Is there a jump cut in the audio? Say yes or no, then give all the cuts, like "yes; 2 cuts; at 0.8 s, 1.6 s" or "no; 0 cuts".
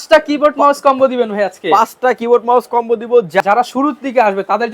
yes; 1 cut; at 3.4 s